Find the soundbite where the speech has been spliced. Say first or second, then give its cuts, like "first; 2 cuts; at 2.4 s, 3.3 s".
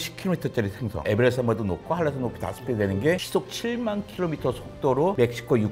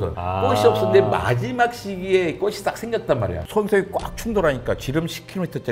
second; 1 cut; at 3.4 s